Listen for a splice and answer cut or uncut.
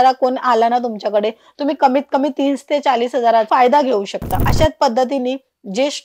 cut